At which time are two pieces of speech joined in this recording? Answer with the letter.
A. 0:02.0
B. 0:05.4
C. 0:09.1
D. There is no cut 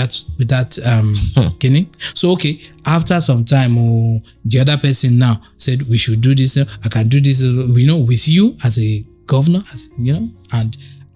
D